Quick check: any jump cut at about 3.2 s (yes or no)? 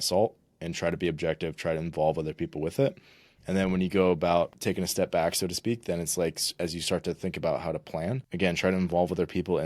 no